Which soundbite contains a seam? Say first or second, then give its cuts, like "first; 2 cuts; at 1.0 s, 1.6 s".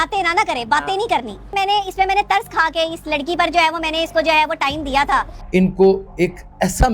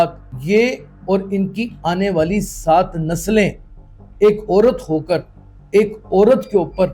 first; 2 cuts; at 1.5 s, 5.4 s